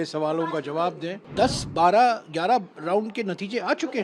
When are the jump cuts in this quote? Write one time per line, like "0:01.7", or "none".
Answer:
0:01.2